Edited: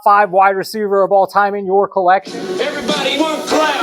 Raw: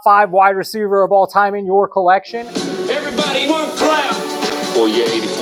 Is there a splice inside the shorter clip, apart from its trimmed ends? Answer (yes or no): yes